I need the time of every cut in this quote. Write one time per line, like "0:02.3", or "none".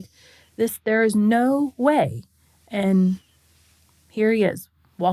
none